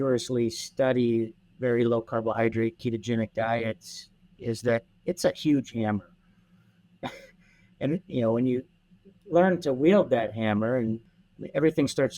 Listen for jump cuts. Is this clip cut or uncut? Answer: cut